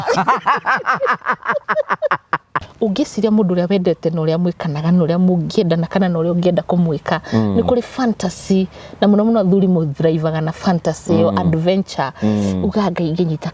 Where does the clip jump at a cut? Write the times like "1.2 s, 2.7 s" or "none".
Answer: 2.6 s